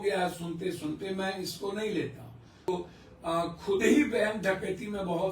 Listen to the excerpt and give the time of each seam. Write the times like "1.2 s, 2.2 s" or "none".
2.7 s